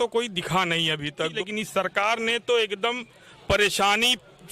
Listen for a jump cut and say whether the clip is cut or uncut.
cut